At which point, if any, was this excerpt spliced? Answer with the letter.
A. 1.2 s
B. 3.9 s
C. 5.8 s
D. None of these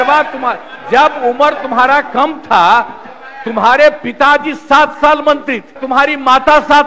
C